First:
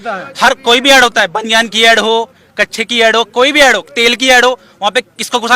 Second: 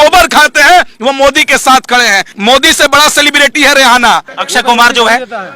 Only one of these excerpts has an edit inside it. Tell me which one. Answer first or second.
second